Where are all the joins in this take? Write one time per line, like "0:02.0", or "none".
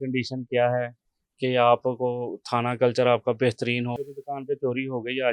0:04.0